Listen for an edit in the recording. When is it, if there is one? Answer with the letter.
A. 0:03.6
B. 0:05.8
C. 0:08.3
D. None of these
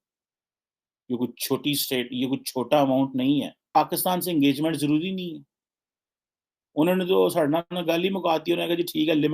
A